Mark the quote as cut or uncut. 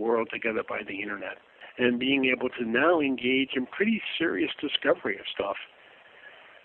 cut